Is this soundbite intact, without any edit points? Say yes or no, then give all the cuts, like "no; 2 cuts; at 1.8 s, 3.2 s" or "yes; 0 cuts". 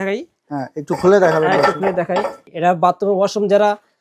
no; 1 cut; at 2.5 s